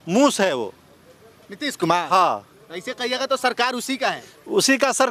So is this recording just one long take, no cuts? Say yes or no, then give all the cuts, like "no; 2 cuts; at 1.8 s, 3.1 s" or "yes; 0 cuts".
yes; 0 cuts